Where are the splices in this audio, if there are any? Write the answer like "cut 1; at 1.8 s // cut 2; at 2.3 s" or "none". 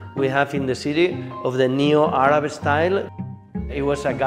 cut 1; at 3.4 s